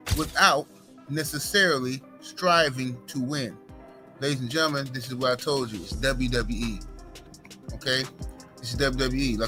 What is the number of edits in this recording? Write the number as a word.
zero